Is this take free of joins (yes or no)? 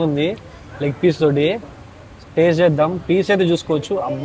yes